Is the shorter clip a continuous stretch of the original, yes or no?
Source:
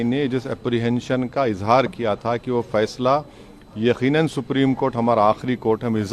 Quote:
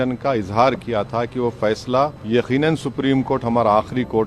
no